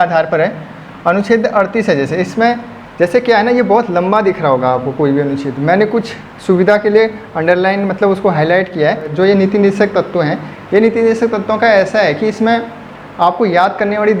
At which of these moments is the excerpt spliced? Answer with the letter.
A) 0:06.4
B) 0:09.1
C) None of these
B